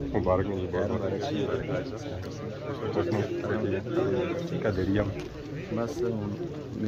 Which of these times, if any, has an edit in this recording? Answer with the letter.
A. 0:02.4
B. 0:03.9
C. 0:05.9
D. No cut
D